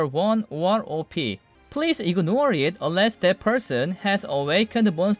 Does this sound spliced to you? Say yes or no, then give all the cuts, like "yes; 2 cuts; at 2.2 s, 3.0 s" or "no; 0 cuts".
yes; 1 cut; at 1.5 s